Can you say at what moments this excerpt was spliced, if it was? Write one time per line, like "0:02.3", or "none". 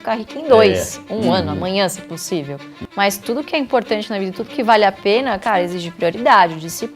0:02.9